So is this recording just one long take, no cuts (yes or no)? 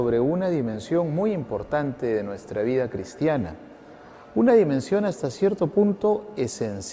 yes